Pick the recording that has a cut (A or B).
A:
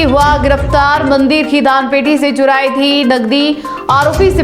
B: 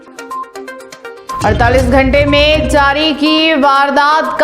B